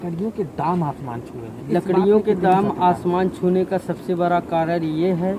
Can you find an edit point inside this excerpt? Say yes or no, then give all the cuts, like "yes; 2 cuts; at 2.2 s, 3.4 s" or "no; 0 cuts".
no; 0 cuts